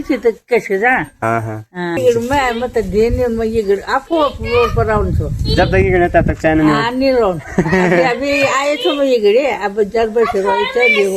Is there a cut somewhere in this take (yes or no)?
yes